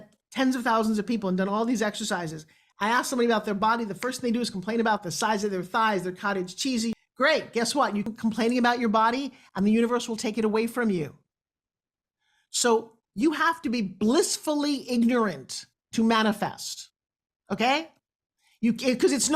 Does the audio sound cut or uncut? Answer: cut